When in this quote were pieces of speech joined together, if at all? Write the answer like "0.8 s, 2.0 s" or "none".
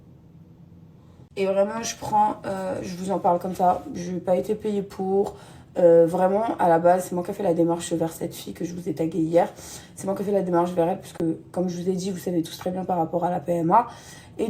1.1 s